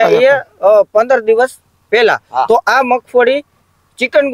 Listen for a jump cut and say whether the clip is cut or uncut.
uncut